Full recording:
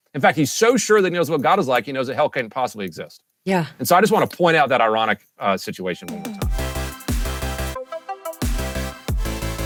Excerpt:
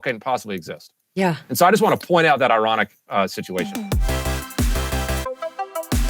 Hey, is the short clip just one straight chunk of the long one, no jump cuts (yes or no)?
no